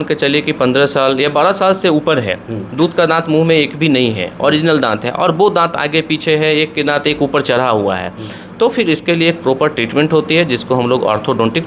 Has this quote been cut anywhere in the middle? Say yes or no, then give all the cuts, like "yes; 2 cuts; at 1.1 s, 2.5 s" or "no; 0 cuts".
no; 0 cuts